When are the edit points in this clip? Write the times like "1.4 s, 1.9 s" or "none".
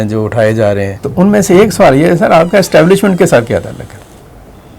1.0 s